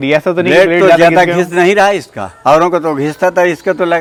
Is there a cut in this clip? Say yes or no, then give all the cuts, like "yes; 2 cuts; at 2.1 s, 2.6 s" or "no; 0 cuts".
no; 0 cuts